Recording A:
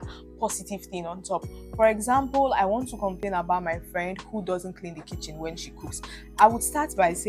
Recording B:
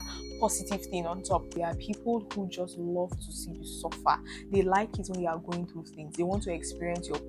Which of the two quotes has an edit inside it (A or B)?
B